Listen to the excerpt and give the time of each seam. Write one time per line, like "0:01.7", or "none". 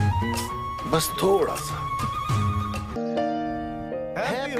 0:03.0